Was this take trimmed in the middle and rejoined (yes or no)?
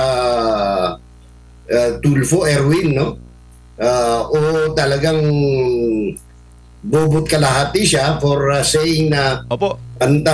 no